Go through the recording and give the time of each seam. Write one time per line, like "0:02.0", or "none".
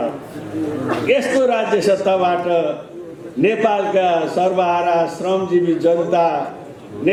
none